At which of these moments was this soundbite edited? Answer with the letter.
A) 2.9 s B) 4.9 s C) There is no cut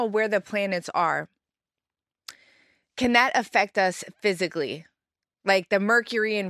C